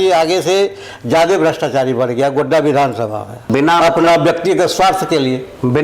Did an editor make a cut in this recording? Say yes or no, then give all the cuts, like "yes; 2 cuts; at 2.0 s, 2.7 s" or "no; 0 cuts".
yes; 1 cut; at 3.4 s